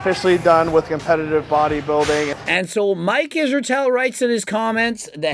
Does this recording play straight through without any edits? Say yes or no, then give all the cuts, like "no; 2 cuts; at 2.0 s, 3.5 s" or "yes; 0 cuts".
no; 1 cut; at 2.4 s